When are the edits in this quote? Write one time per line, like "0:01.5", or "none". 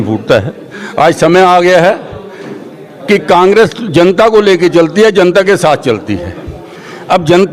none

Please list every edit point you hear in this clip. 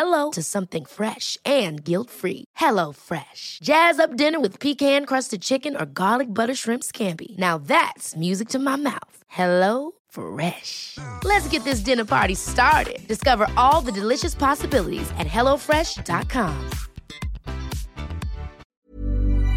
0:18.6

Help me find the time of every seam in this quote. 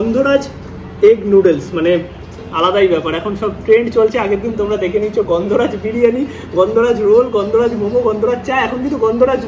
none

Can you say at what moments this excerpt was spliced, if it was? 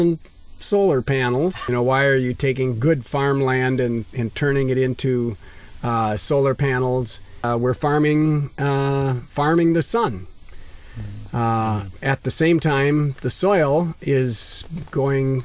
0:01.6
0:07.4

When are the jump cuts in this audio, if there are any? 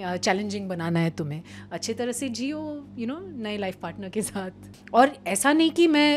0:04.7

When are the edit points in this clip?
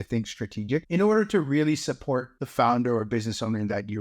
0:00.9
0:02.4

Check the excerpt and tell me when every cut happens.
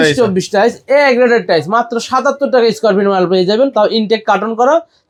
none

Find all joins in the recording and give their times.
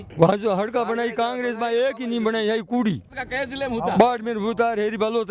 0:03.1

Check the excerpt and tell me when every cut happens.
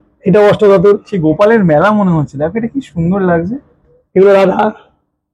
none

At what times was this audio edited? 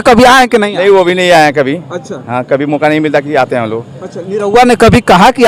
none

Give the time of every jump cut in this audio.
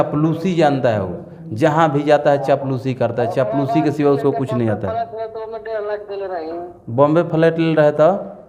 none

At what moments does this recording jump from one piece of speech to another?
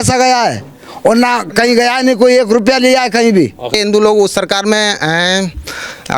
0:03.7

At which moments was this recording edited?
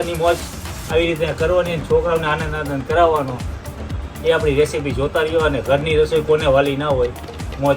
none

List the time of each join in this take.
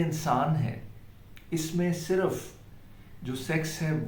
none

